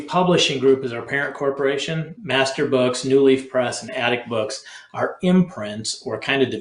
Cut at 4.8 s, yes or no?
no